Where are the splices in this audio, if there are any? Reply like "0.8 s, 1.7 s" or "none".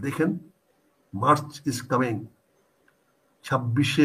none